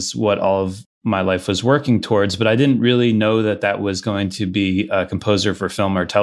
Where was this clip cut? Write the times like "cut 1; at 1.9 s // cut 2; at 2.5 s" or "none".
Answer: none